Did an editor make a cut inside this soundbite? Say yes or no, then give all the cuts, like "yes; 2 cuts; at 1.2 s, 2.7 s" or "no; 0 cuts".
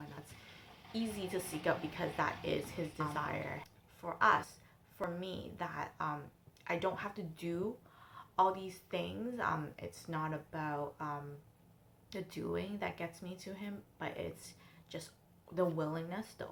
no; 0 cuts